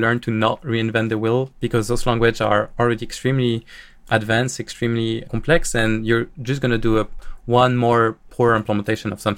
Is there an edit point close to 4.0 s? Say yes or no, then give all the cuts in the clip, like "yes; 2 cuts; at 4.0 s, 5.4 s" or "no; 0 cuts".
no; 3 cuts; at 2.7 s, 5.3 s, 8.3 s